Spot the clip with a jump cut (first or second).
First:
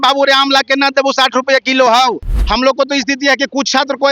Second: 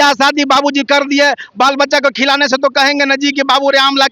first